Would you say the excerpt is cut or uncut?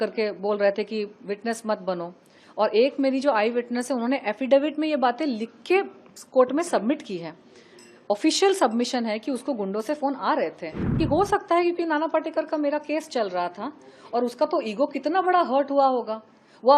cut